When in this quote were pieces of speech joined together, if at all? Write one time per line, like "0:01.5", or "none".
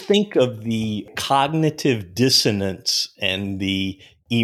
0:01.1

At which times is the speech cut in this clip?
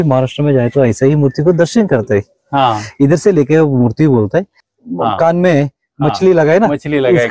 0:04.6

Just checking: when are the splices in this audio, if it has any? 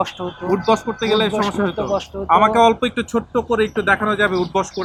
none

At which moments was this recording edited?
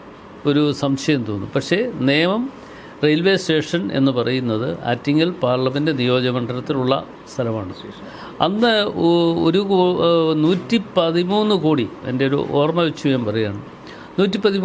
none

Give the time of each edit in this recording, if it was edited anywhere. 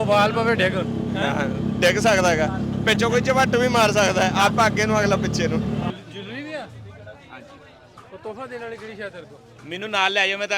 0:05.9

